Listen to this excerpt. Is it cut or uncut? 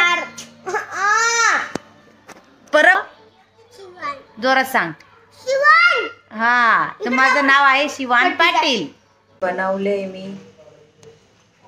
cut